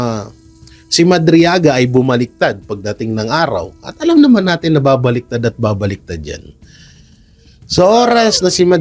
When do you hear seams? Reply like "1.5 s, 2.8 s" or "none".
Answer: none